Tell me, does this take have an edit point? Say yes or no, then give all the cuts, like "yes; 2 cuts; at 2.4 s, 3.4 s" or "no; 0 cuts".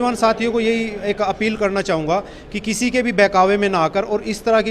no; 0 cuts